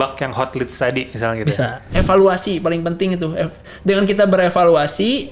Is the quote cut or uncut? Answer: cut